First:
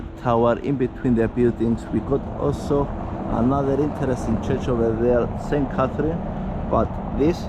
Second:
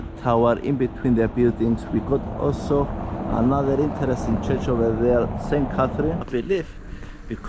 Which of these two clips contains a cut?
second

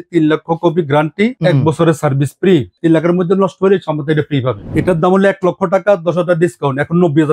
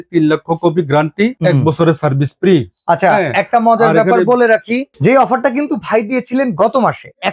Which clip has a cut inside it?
first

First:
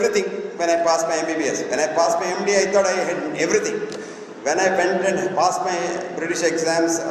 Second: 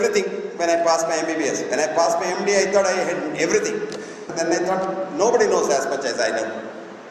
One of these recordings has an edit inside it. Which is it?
second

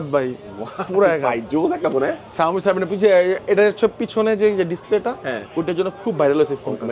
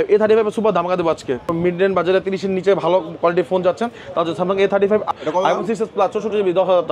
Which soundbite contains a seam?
second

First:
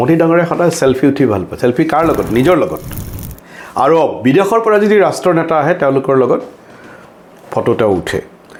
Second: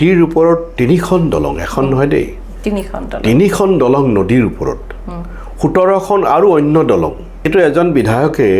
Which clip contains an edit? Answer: second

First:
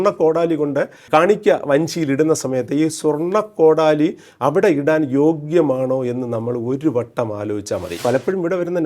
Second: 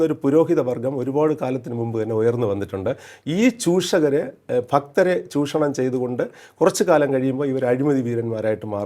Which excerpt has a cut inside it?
first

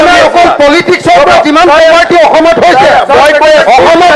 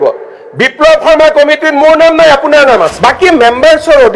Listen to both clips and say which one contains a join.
second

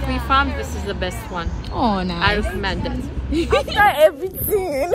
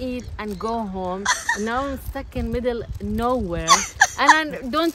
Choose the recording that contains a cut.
first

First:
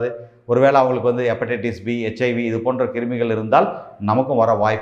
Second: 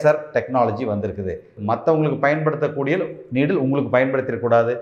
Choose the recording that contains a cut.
second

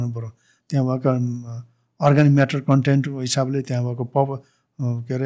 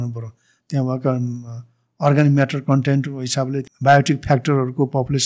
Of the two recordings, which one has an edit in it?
second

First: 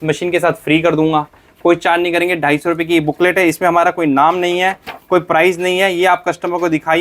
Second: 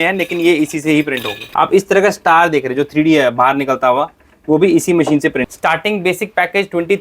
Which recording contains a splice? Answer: second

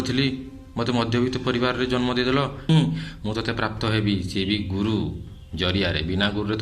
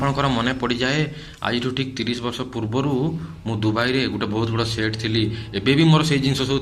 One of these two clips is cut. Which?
first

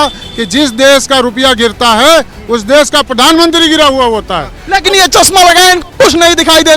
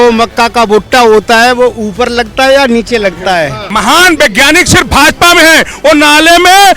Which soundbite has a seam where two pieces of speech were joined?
second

